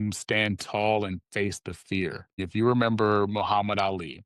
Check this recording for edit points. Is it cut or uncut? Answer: cut